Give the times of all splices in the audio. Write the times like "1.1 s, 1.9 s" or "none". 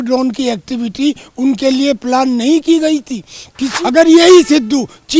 3.7 s